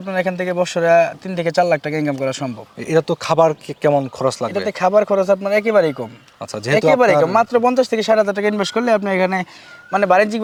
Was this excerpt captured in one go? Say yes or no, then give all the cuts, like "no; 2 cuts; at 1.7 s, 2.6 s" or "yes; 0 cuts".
yes; 0 cuts